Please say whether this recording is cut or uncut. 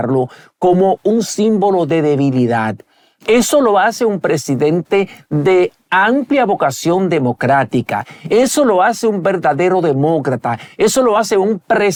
uncut